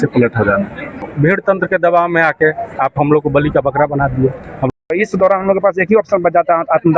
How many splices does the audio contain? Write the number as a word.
two